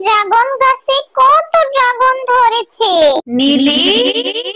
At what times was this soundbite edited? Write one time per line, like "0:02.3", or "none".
0:03.3